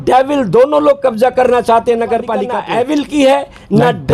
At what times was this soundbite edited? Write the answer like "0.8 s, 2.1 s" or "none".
2.5 s